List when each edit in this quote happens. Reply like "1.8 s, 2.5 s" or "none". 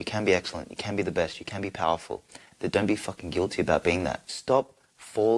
4.3 s